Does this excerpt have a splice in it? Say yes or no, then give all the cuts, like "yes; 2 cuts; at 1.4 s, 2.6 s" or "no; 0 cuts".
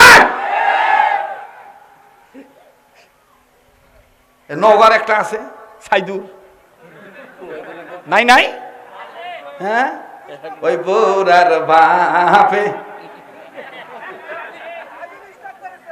no; 0 cuts